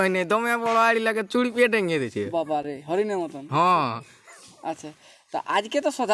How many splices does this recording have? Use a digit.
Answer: 0